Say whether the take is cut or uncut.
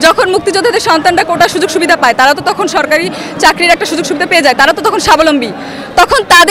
uncut